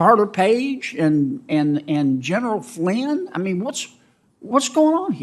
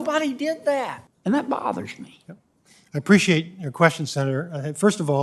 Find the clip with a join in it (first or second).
second